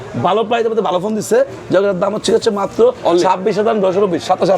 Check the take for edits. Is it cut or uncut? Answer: uncut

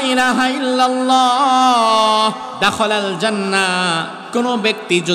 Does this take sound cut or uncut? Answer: cut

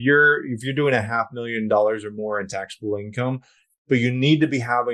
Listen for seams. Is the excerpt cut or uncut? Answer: cut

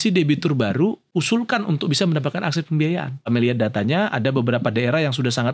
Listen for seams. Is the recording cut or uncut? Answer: cut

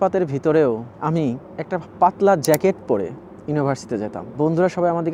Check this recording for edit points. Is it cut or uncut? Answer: uncut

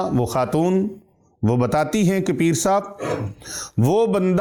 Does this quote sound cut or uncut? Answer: uncut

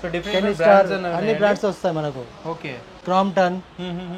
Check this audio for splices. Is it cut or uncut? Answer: uncut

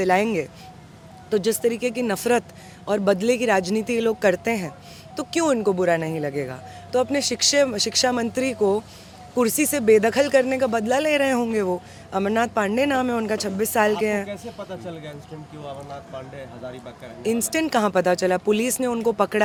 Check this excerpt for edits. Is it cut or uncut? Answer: uncut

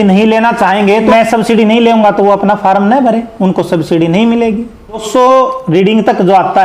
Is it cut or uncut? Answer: cut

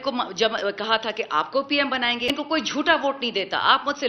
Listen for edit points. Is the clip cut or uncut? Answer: cut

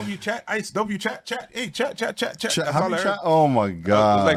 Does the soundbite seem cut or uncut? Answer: uncut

